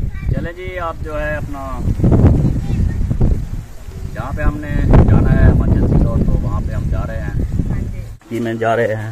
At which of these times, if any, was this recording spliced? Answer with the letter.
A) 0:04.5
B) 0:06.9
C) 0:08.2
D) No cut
C